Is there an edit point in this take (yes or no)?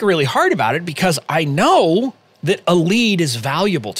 yes